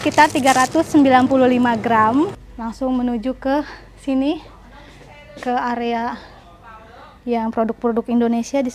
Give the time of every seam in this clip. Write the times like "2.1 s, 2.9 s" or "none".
2.5 s